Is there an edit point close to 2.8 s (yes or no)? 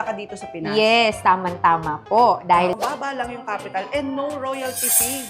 yes